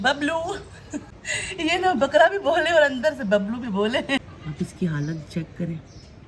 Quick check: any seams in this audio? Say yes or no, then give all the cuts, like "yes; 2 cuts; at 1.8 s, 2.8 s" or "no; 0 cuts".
yes; 2 cuts; at 1.1 s, 4.4 s